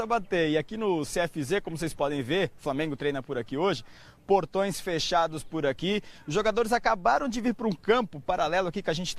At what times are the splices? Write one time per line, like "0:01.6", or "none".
0:02.6